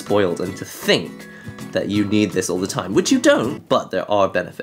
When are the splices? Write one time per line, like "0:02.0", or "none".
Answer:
0:03.6